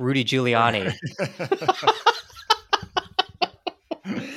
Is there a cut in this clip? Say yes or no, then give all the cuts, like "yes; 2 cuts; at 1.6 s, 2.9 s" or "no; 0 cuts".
no; 0 cuts